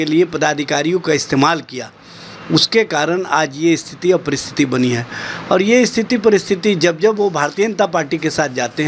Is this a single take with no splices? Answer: yes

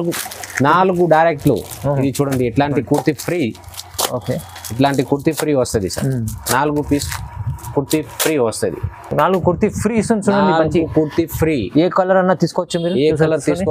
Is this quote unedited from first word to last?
yes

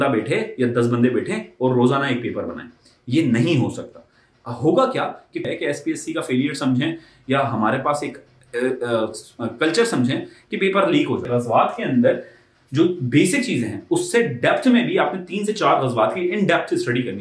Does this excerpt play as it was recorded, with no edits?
no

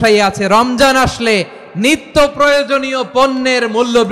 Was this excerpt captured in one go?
yes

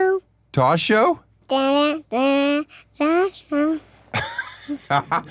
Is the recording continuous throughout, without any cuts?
yes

